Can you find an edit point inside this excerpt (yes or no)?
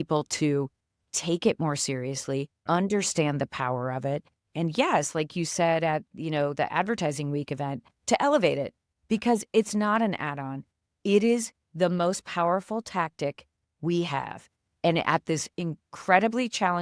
yes